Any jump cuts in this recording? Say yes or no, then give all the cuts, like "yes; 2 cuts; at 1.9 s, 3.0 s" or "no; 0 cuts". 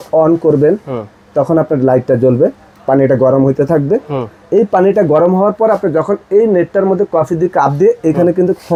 no; 0 cuts